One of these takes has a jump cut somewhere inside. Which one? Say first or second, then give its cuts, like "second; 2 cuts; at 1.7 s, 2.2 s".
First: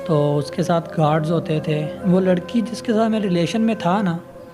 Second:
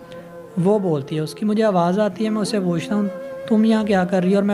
first; 1 cut; at 1.9 s